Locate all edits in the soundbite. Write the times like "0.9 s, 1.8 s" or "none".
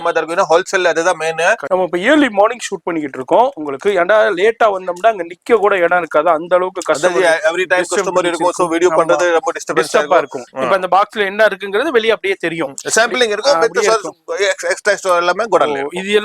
1.6 s, 10.4 s